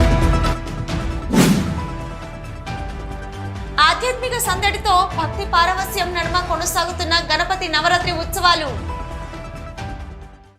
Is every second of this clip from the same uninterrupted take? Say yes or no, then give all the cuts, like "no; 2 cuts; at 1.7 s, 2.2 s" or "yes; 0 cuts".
yes; 0 cuts